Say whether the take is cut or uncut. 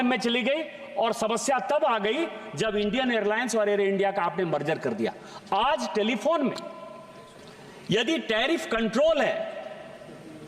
uncut